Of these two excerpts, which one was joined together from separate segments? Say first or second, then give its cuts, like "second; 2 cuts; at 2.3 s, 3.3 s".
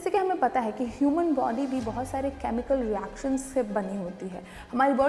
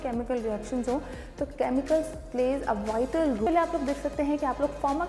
second; 1 cut; at 3.5 s